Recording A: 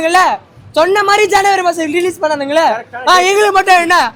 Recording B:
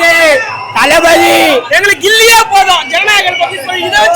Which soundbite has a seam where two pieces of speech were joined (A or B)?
B